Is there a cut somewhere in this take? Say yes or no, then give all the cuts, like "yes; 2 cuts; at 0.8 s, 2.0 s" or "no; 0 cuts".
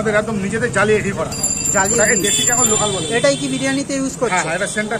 no; 0 cuts